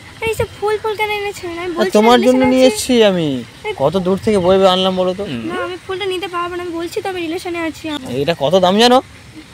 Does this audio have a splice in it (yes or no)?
yes